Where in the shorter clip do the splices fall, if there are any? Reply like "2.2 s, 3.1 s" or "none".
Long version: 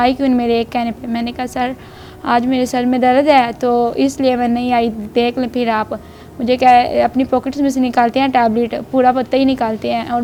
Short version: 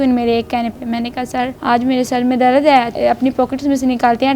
1.6 s, 2.9 s